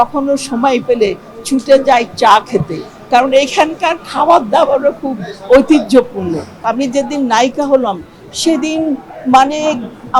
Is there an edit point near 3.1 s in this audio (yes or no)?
no